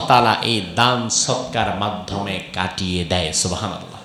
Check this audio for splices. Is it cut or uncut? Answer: uncut